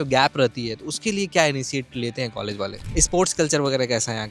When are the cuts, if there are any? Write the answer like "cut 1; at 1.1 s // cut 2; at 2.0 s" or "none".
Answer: cut 1; at 2.8 s